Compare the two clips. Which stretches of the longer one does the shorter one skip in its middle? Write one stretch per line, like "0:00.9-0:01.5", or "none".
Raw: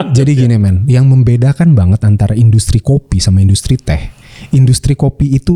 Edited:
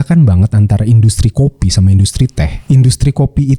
0:04.0-0:04.4